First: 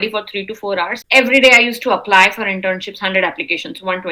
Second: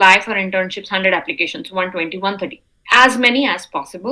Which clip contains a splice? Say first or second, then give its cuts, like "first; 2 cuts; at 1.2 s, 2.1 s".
first; 1 cut; at 1.0 s